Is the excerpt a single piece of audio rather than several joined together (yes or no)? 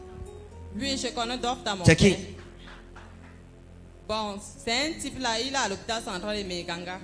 yes